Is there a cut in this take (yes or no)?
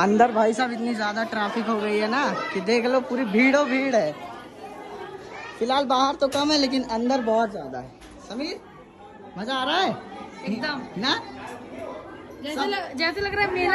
no